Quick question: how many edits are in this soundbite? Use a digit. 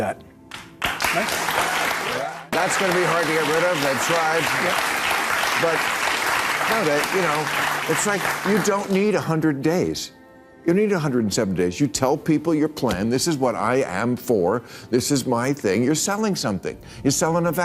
1